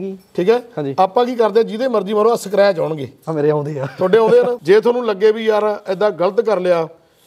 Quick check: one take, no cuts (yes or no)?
no